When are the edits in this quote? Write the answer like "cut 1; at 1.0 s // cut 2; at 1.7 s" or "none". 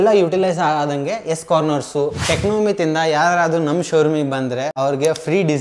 cut 1; at 2.2 s // cut 2; at 4.7 s